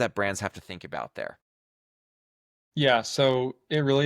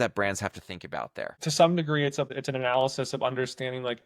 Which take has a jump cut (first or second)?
second